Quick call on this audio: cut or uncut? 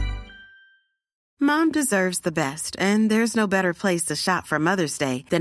cut